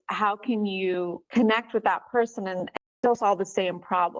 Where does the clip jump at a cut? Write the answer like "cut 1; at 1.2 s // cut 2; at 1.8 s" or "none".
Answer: cut 1; at 1.2 s // cut 2; at 2.7 s